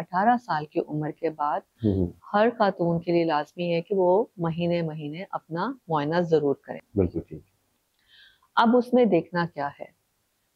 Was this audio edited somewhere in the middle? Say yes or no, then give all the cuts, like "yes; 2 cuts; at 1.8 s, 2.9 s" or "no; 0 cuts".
no; 0 cuts